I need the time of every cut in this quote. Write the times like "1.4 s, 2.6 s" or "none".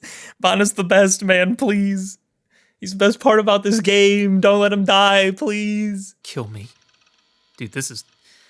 6.2 s

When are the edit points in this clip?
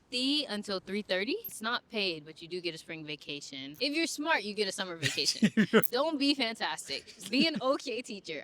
1.5 s, 3.8 s, 5.9 s

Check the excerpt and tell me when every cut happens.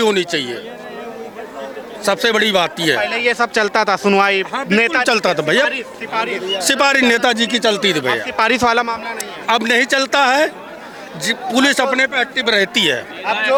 none

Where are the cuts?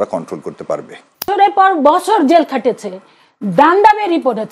1.3 s

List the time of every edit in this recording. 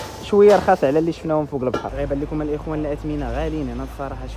1.9 s

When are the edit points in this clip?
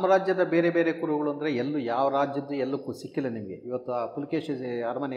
none

